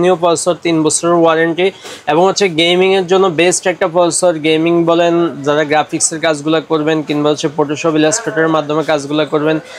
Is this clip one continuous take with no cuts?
yes; 0 cuts

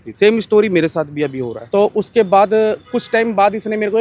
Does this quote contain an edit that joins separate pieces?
no; 0 cuts

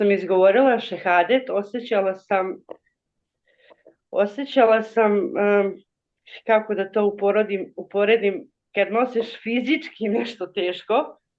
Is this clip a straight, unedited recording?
yes; 0 cuts

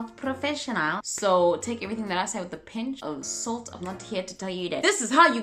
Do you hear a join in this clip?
no; 0 cuts

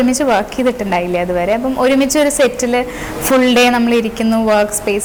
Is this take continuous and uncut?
yes; 0 cuts

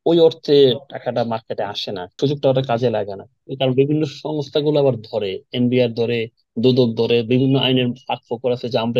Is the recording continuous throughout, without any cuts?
no; 2 cuts; at 2.2 s, 3.5 s

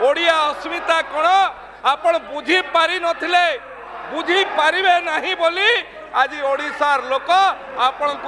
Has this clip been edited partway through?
no; 0 cuts

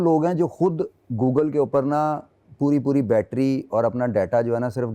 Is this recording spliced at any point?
no; 0 cuts

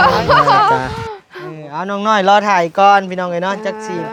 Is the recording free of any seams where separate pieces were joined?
yes; 0 cuts

